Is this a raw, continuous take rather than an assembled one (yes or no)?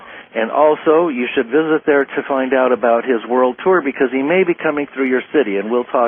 yes